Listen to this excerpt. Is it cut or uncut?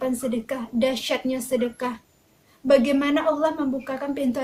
uncut